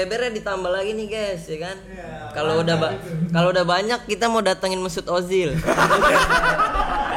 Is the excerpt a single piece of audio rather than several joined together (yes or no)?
yes